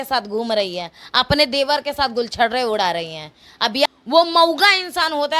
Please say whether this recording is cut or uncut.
cut